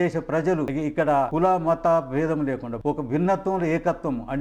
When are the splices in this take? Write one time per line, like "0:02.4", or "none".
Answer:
0:01.2
0:02.7